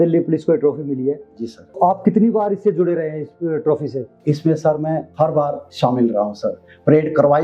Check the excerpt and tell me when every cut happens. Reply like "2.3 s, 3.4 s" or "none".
1.8 s, 4.1 s, 5.4 s

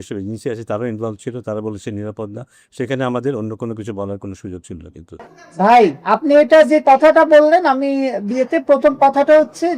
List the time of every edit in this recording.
5.3 s

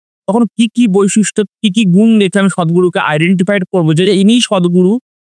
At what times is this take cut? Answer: none

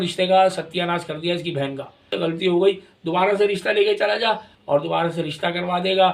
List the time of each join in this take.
2.1 s, 4.5 s

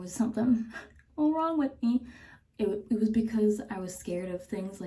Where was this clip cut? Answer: none

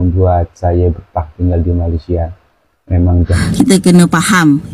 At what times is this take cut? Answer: 3.6 s

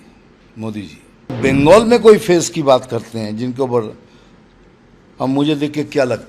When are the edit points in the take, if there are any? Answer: 1.4 s

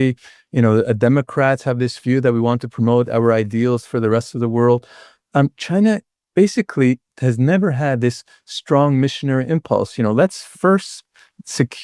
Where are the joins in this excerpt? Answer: none

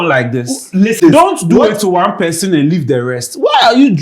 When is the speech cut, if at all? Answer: 1.0 s

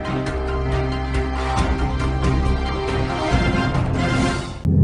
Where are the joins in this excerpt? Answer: none

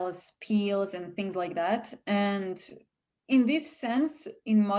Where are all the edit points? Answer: none

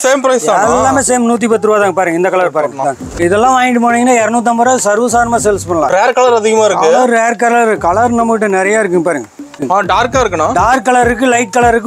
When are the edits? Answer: 3.2 s, 5.9 s, 9.6 s

